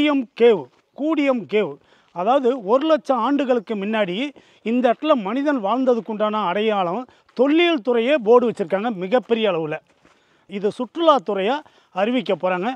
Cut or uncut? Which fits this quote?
cut